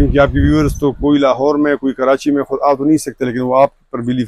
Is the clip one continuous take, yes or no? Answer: yes